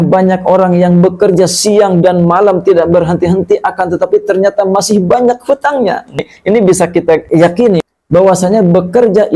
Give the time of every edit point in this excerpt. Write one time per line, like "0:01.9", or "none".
0:06.3
0:07.2